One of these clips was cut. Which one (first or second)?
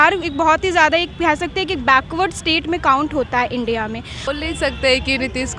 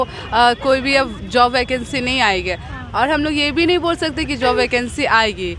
first